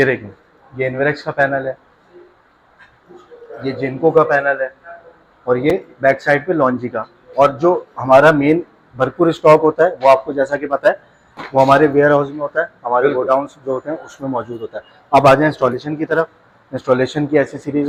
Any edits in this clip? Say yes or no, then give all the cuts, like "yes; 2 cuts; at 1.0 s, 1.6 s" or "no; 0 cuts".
no; 0 cuts